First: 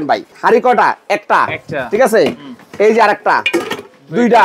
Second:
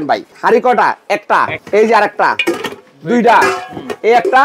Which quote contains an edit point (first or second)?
second